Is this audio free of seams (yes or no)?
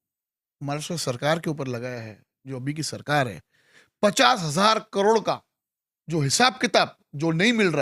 yes